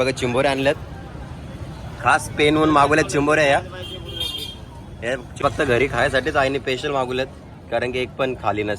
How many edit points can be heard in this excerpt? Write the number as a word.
one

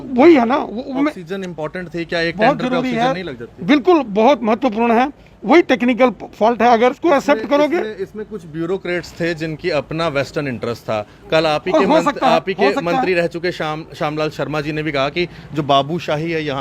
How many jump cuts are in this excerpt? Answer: one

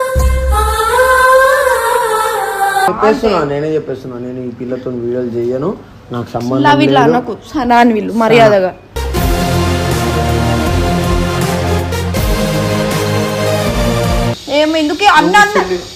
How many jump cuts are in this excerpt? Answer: two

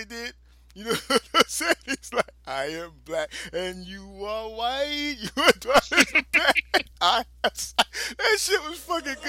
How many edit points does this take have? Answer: zero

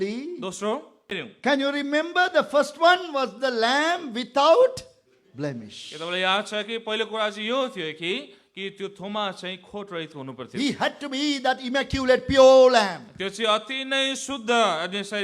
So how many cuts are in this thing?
one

